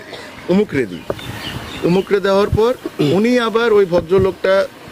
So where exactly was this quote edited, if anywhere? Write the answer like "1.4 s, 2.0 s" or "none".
none